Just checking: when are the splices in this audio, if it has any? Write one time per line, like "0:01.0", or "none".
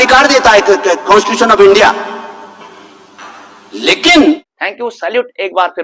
0:04.5